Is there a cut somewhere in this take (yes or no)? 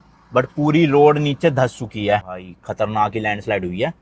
no